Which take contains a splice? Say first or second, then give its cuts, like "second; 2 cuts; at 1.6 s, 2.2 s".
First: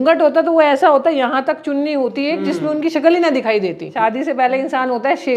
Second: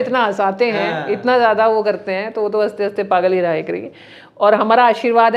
first; 1 cut; at 3.9 s